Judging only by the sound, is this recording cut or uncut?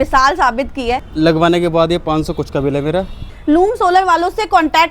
cut